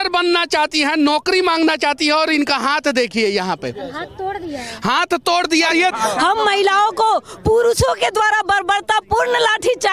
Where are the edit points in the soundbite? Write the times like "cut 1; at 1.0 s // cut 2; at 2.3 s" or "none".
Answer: cut 1; at 5.9 s